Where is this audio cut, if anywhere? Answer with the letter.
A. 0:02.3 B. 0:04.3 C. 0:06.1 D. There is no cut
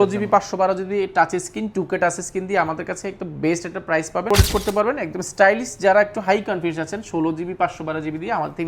B